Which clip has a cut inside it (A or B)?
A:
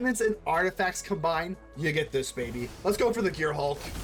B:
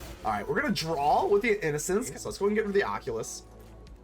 B